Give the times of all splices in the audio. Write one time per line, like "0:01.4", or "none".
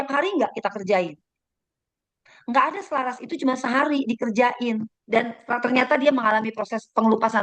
0:04.9